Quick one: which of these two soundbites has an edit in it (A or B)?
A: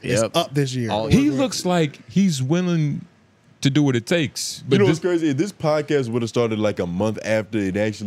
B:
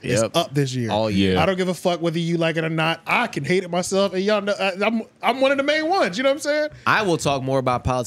A